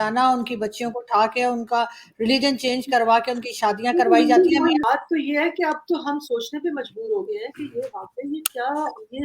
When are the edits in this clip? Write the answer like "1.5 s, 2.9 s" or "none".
4.8 s